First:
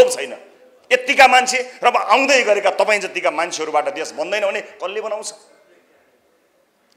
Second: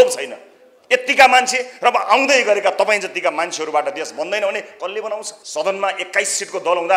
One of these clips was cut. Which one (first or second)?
second